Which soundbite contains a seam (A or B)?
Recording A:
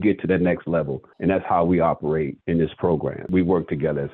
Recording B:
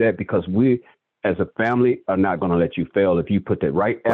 A